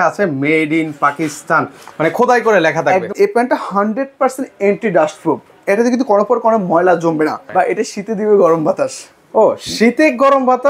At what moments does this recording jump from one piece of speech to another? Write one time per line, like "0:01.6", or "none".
0:03.1
0:07.4